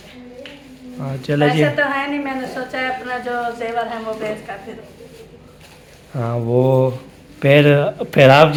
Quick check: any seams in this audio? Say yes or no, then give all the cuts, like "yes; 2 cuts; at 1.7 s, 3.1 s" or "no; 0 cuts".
no; 0 cuts